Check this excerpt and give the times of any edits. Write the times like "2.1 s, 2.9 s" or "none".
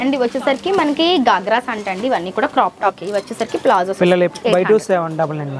3.0 s, 4.3 s

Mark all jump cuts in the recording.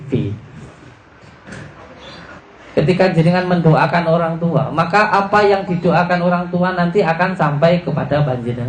2.4 s

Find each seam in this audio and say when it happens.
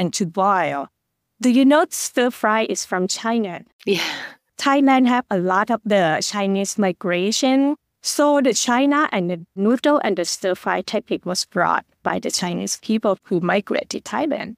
4.5 s

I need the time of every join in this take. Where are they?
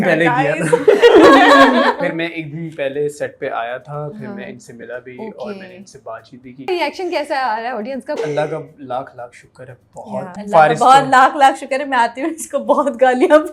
2.0 s, 6.7 s, 8.2 s, 10.4 s

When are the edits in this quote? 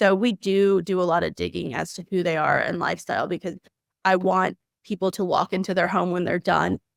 none

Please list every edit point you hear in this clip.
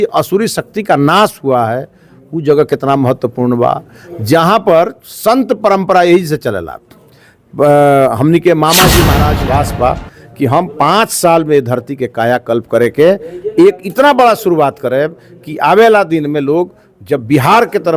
9.3 s

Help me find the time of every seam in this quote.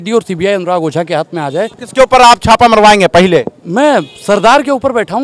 1.8 s

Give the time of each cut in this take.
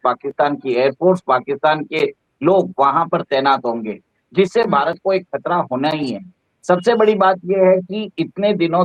none

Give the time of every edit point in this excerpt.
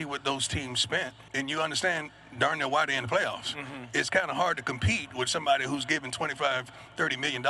1.2 s

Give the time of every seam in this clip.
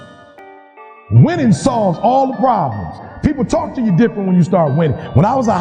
3.0 s

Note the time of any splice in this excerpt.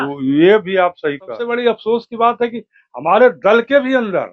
1.4 s

